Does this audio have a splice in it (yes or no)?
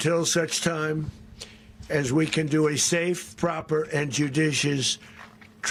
no